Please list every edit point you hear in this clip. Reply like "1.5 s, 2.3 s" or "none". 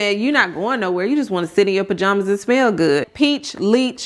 3.1 s